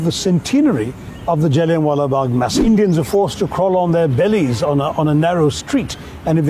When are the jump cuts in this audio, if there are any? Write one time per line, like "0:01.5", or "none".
0:02.5